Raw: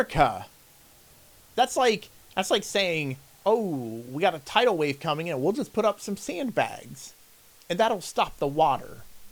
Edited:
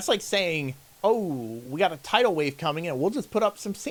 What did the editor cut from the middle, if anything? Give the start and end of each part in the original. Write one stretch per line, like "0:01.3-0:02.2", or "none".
none